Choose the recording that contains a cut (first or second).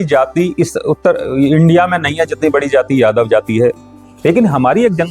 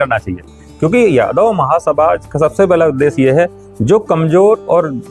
first